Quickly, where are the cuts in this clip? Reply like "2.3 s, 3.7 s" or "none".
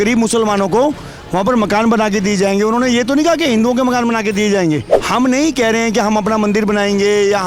4.9 s